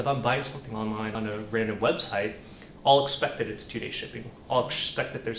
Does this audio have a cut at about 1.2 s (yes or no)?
yes